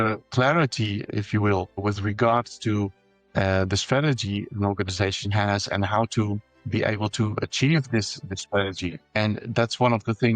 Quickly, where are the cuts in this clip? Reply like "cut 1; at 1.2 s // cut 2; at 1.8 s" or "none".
none